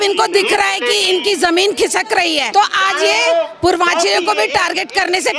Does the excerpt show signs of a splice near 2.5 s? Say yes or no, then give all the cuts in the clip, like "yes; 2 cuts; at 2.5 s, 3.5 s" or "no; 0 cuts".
yes; 1 cut; at 2.5 s